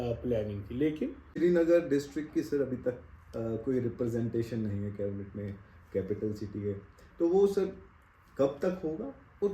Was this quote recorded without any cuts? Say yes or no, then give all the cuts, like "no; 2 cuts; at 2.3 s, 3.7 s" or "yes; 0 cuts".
no; 1 cut; at 1.2 s